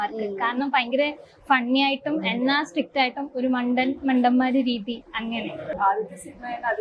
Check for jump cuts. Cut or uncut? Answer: cut